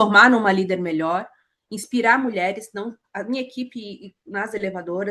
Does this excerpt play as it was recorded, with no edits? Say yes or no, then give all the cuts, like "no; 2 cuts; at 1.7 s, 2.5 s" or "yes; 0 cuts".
yes; 0 cuts